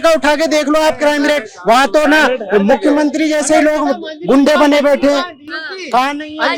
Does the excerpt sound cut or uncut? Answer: uncut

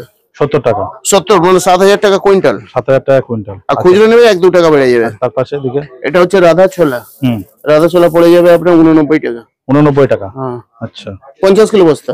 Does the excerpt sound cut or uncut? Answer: uncut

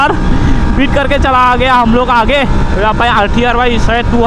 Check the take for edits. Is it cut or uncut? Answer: uncut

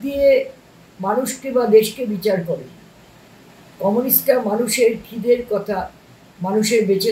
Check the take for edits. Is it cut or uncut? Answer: uncut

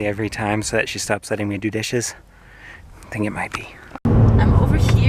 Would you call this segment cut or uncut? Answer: cut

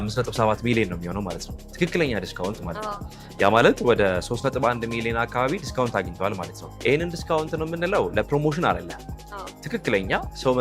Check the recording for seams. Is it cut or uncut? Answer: uncut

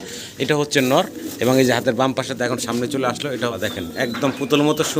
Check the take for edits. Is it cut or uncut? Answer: cut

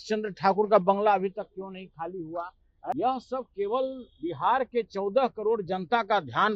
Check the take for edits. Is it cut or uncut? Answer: cut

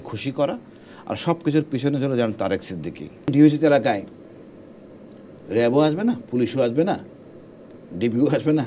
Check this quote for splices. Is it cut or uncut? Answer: cut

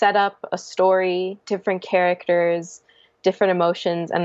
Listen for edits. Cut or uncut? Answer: uncut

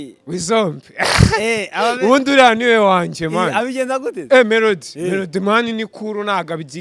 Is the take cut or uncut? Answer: uncut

